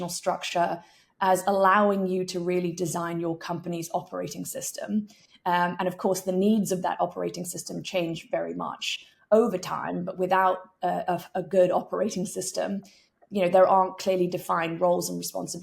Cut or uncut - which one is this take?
uncut